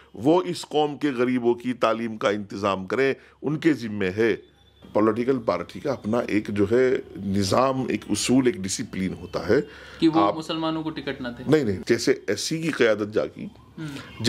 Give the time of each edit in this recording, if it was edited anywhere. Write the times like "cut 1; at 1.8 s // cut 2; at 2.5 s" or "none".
cut 1; at 4.8 s // cut 2; at 11.8 s